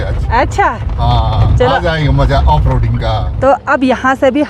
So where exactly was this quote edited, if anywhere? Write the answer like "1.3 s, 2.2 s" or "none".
3.2 s